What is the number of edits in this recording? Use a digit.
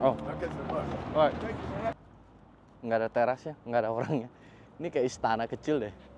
1